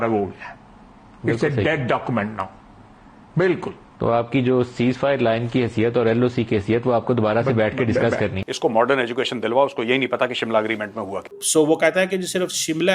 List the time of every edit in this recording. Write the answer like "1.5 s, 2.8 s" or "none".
none